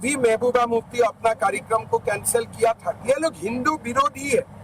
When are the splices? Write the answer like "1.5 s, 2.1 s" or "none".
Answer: 3.0 s